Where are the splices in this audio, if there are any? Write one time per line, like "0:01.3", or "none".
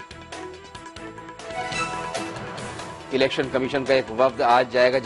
0:01.4
0:02.9